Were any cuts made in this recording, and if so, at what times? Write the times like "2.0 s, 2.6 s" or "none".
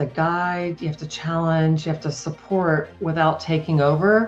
2.9 s